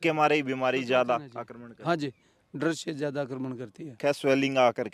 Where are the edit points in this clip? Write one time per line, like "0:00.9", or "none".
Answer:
0:04.0